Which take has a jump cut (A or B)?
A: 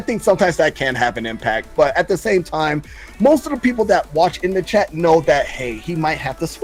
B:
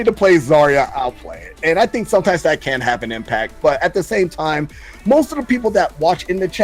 B